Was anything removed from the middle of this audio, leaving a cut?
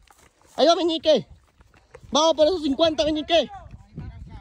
no; 0 cuts

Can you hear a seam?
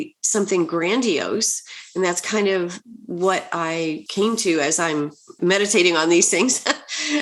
yes; 2 cuts; at 4.0 s, 5.2 s

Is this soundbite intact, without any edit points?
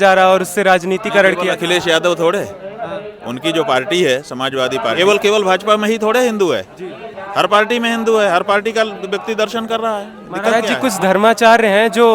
no; 2 cuts; at 4.9 s, 10.5 s

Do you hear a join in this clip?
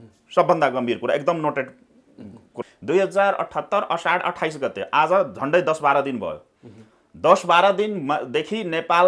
yes; 1 cut; at 2.5 s

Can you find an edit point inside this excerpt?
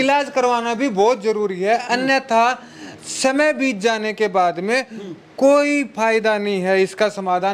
no; 0 cuts

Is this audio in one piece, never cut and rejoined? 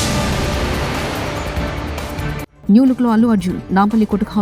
yes; 0 cuts

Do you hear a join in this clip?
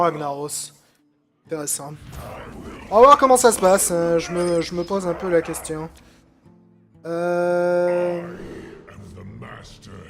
no; 0 cuts

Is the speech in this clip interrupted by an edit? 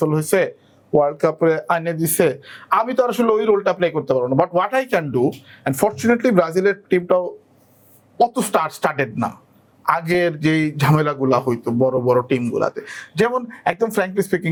no; 0 cuts

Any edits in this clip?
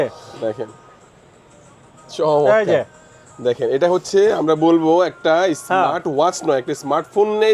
no; 0 cuts

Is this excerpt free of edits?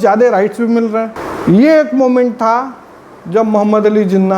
no; 1 cut; at 1.2 s

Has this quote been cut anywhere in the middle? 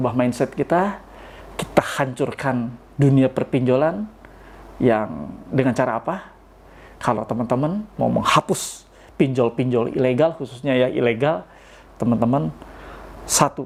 no; 0 cuts

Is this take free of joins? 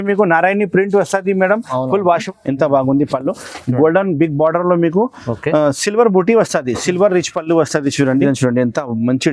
no; 2 cuts; at 2.2 s, 8.2 s

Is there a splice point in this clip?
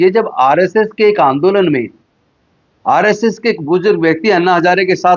no; 0 cuts

